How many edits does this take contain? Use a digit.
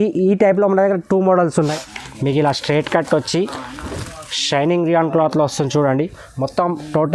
1